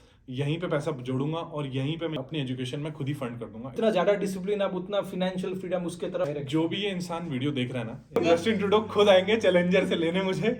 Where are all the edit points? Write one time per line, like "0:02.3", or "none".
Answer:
0:02.2
0:03.6
0:06.2
0:08.2

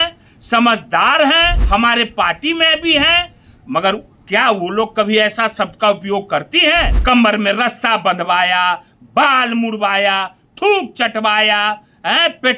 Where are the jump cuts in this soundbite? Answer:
0:01.6
0:06.9

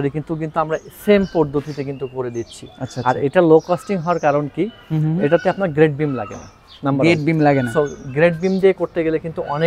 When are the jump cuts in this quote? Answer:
none

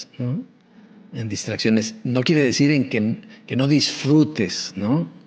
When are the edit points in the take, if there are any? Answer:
none

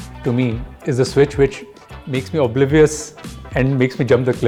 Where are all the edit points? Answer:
none

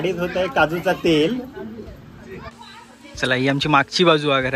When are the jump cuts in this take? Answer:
0:02.5

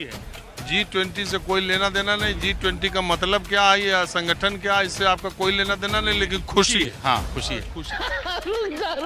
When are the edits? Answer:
0:07.8

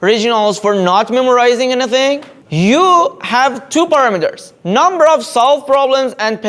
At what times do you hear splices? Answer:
none

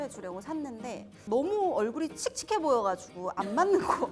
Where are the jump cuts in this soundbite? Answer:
0:01.1

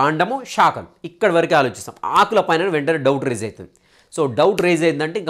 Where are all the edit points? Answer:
none

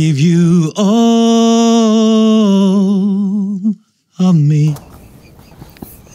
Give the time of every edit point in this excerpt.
none

